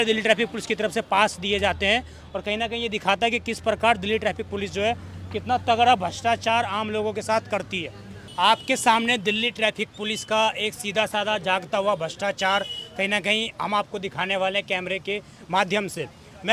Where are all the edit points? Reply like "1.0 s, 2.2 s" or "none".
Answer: none